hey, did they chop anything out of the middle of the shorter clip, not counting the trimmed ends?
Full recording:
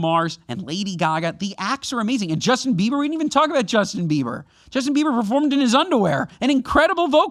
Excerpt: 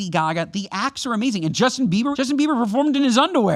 yes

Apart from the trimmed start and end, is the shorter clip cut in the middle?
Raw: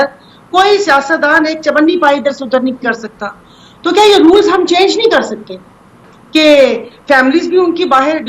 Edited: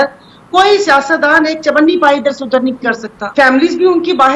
yes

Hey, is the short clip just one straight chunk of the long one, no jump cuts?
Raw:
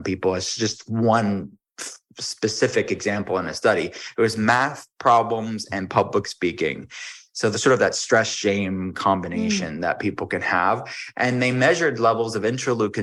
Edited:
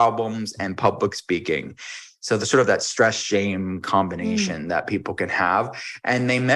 yes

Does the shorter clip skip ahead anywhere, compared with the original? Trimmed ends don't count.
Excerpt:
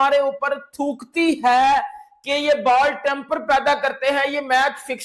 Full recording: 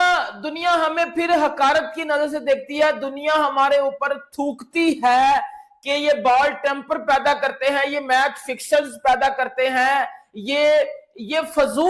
no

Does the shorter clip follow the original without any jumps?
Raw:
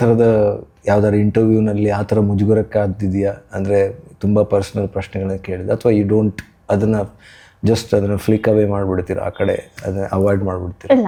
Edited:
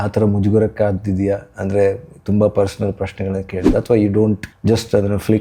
no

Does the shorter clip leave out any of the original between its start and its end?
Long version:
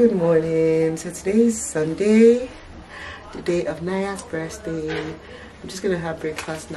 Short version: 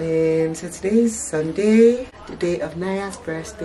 yes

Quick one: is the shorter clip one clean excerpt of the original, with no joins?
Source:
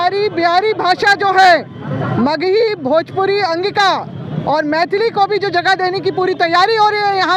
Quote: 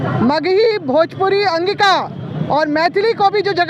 yes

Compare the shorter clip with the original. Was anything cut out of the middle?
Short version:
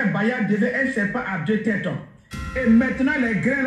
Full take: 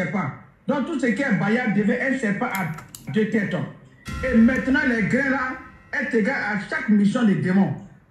yes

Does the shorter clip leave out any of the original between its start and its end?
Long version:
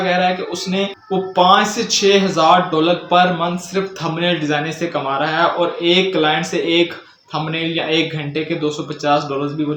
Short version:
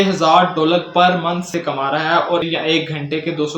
yes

